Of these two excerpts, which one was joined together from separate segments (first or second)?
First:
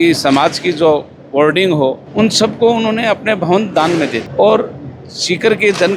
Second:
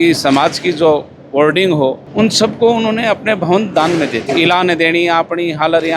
second